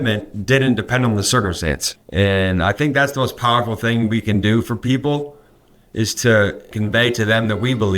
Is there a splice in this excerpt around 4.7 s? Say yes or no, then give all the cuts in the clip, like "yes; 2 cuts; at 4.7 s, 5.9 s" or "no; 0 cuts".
no; 2 cuts; at 1.9 s, 6.7 s